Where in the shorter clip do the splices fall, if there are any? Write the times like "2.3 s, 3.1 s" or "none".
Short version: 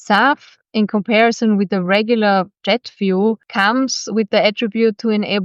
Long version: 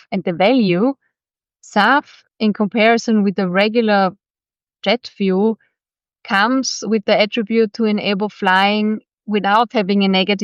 2.5 s, 3.5 s